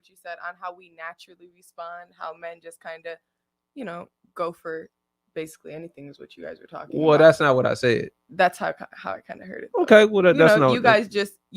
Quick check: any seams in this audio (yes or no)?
no